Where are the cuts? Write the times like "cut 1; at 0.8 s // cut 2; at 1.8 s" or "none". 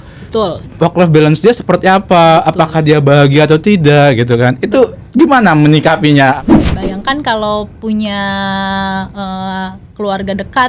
cut 1; at 6.4 s